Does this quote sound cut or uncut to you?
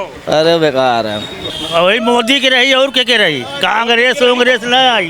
cut